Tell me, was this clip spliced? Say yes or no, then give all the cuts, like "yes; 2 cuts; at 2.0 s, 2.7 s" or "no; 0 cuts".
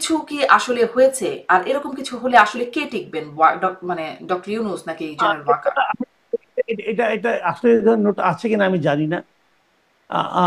no; 0 cuts